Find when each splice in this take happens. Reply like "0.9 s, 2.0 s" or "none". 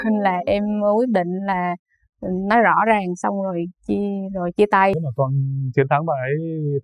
5.0 s